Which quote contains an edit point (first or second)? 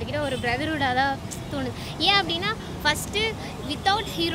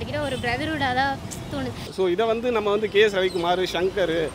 second